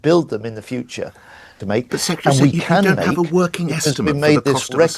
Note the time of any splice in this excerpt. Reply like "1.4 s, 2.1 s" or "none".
1.6 s